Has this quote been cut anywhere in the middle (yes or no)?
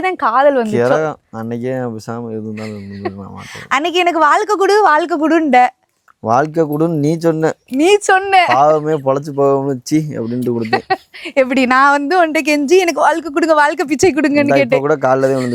no